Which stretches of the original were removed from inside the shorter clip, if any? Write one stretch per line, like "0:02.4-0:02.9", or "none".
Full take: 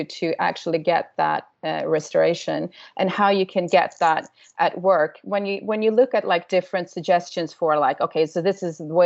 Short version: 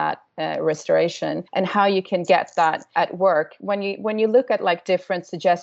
0:02.7-0:02.9
0:04.3-0:04.5